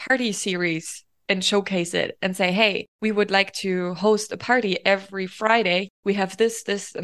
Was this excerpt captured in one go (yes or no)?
no